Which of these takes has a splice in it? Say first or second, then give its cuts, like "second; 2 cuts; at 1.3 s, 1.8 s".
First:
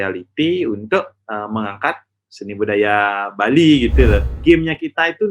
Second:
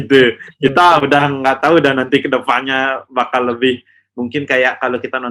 first; 1 cut; at 4.3 s